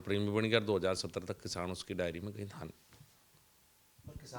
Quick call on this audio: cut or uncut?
uncut